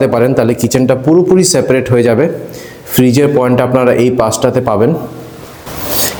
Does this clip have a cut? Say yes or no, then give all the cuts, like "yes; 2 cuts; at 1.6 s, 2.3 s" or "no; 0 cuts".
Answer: no; 0 cuts